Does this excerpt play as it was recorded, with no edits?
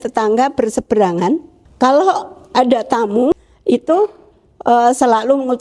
no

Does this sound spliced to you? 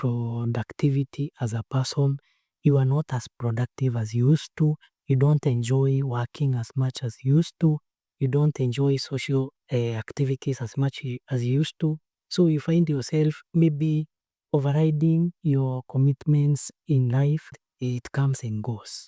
yes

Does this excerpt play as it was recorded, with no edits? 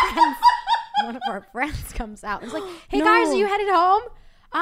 no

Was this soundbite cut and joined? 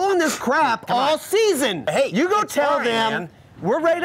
yes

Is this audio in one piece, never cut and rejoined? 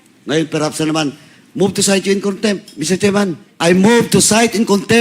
no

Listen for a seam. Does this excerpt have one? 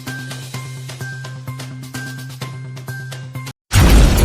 no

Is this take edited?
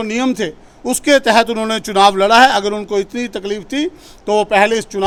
no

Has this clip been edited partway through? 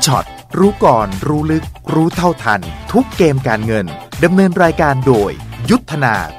no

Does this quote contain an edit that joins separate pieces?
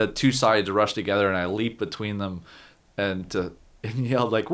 no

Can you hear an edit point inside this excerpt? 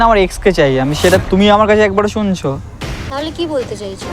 yes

